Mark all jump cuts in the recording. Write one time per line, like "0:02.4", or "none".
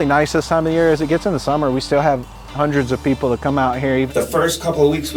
0:04.1